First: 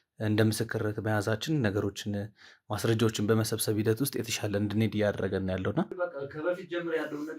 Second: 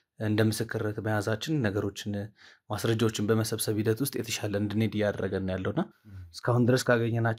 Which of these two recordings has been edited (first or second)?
first